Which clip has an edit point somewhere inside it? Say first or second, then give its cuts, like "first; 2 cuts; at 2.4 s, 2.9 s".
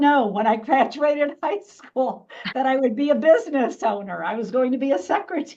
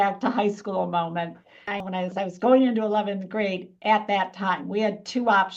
second; 1 cut; at 1.7 s